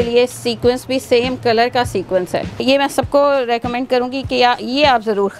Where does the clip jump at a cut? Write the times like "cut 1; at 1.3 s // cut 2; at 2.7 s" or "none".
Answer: cut 1; at 2.6 s